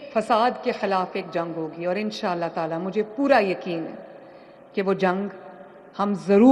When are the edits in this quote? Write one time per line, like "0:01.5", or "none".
none